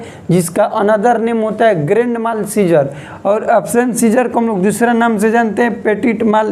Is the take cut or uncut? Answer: uncut